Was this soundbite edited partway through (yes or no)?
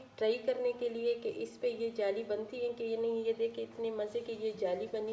no